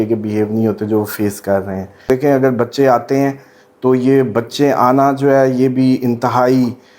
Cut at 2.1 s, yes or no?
yes